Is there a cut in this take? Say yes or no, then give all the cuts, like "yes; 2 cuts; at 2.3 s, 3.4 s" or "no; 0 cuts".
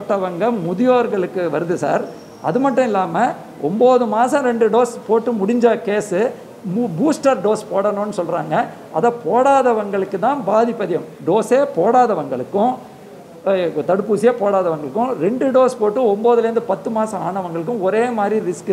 no; 0 cuts